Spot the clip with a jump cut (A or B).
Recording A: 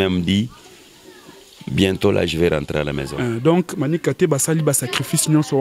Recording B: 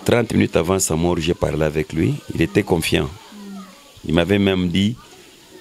A